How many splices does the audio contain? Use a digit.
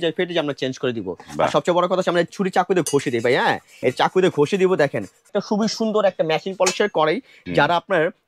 2